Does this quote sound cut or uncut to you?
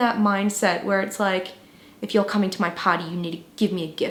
uncut